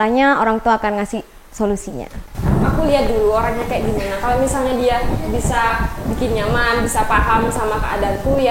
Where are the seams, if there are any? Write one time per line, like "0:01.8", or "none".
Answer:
0:02.5